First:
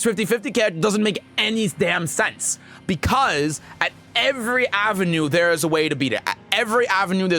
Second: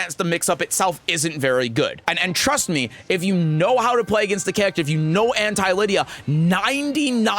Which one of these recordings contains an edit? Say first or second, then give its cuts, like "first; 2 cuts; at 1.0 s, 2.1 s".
second; 1 cut; at 2.0 s